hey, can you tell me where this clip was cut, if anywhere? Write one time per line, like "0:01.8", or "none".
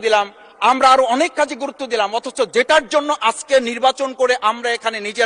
none